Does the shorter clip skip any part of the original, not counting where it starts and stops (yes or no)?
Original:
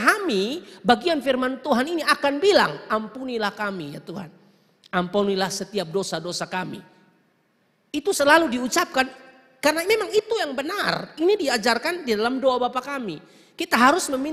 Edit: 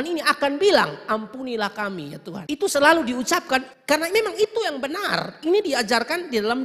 yes